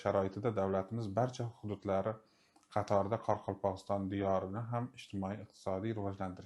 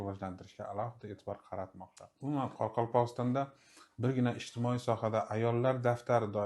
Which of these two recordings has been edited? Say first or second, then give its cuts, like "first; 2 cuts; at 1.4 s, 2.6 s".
second; 1 cut; at 2.1 s